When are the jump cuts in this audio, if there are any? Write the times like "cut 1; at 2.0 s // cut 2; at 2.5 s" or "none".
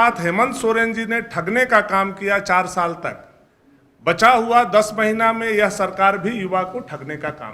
none